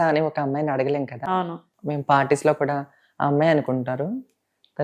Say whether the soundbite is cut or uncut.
cut